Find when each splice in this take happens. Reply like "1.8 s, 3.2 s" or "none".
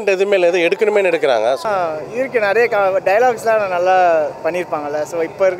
1.6 s